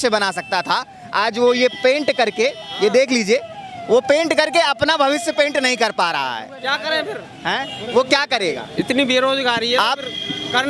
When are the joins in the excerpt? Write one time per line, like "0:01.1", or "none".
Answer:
none